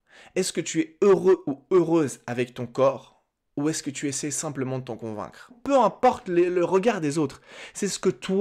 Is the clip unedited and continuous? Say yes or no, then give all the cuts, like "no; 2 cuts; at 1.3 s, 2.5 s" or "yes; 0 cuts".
no; 1 cut; at 5.6 s